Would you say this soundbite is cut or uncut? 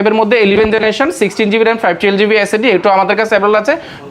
uncut